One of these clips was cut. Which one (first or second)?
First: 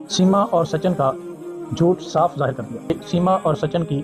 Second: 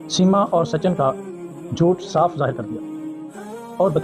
first